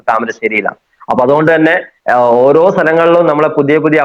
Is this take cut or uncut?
uncut